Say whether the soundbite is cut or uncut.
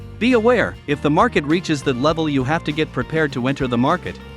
uncut